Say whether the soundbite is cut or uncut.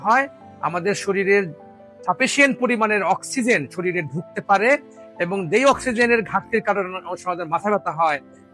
uncut